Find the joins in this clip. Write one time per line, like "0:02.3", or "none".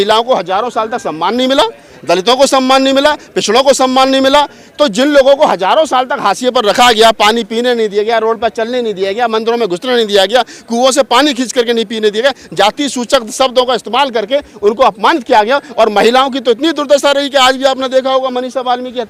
none